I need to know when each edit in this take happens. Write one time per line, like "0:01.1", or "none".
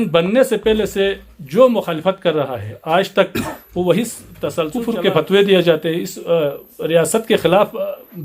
0:04.7